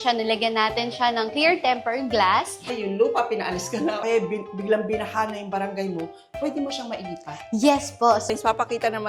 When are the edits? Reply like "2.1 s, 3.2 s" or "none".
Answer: 2.7 s, 4.0 s, 8.3 s